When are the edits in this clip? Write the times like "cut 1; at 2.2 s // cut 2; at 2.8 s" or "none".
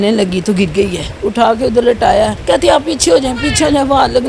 cut 1; at 1.1 s // cut 2; at 2.4 s